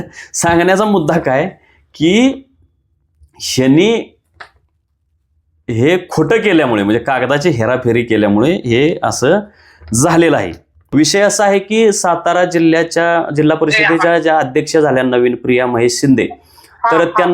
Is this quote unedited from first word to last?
no; 1 cut; at 10.9 s

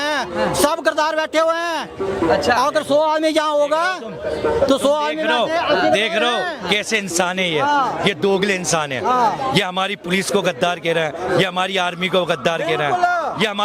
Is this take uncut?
yes; 0 cuts

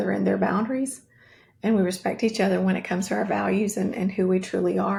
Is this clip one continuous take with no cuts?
yes; 0 cuts

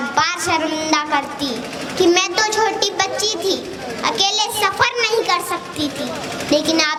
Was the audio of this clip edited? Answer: no; 0 cuts

